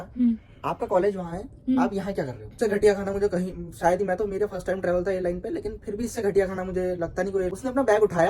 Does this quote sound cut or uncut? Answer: cut